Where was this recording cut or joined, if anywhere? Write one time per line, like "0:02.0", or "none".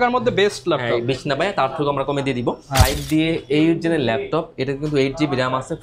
0:02.9